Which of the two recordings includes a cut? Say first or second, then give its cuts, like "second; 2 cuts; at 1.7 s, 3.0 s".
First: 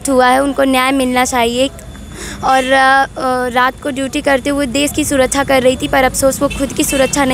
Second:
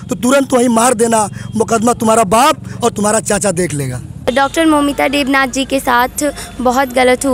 second; 1 cut; at 4.3 s